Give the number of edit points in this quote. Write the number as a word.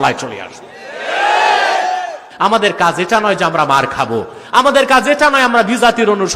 one